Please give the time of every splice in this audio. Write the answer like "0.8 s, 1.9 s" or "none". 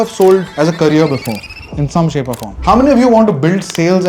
2.4 s